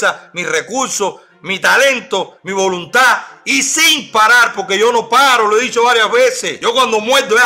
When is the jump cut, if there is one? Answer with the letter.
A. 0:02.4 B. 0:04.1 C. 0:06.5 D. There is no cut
C